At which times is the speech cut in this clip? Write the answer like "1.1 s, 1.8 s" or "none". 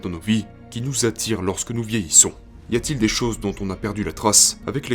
2.5 s